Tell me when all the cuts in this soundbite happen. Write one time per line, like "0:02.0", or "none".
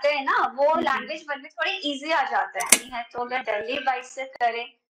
0:02.8